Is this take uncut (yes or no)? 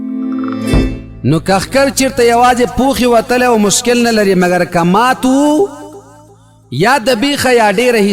no